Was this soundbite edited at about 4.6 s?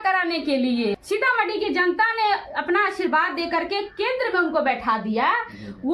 no; 1 cut; at 1.0 s

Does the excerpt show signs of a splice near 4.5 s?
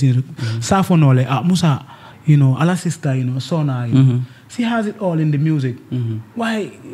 no; 0 cuts

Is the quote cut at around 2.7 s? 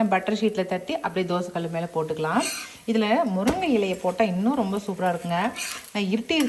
no; 0 cuts

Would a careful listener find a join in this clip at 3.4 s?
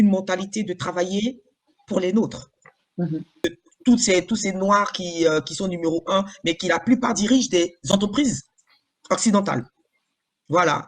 yes; 1 cut; at 3.4 s

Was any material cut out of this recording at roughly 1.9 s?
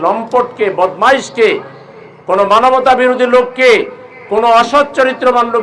no; 0 cuts

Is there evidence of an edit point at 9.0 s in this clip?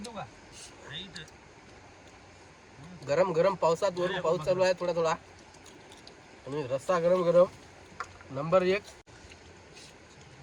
yes; 1 cut; at 9.0 s

